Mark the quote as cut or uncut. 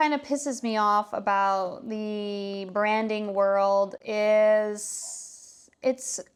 uncut